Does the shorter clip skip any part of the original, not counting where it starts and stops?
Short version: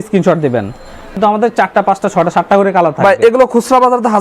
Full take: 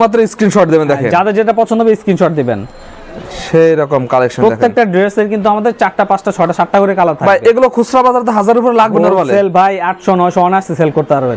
yes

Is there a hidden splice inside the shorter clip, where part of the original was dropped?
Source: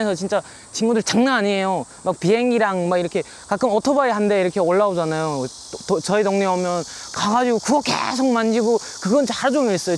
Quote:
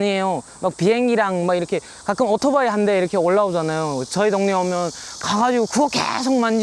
yes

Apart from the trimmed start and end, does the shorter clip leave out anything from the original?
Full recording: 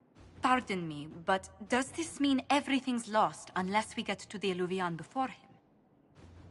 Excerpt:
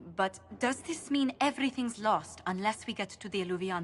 no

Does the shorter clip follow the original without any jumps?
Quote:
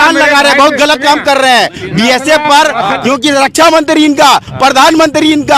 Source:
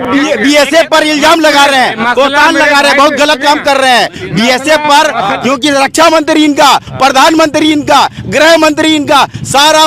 yes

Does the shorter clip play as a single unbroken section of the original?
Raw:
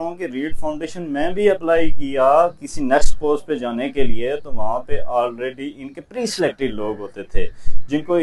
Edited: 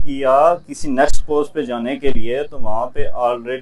yes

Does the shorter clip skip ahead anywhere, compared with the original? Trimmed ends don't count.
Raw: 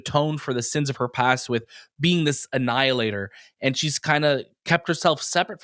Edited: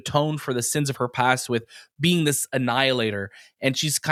no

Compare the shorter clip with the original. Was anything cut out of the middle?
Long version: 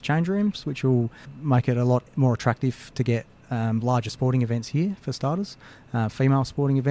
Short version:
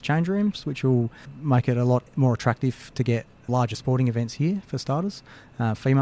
yes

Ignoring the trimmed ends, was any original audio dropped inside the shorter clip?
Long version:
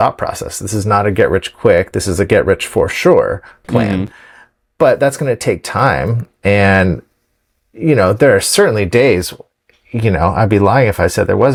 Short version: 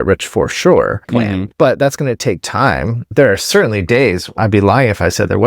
yes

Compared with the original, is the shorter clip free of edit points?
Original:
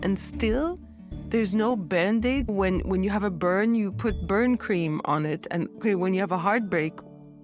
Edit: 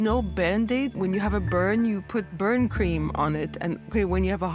no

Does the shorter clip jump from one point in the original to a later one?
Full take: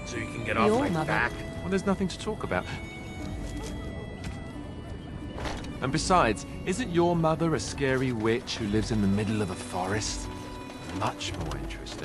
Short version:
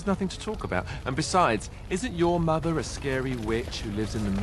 yes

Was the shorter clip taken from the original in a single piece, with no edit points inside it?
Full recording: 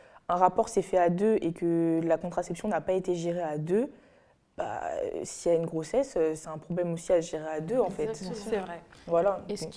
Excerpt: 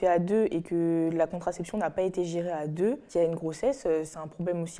no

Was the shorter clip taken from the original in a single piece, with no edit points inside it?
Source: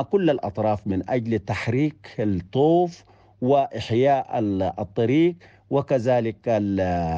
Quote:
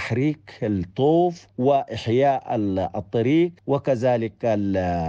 no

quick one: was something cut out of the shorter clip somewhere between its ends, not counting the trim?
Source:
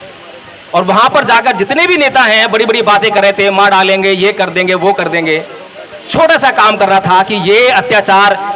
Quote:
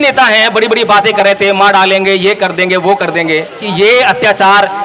yes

